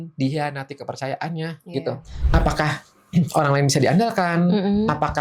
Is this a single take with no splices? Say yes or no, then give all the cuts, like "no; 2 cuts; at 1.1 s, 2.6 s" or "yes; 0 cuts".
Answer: no; 1 cut; at 2.1 s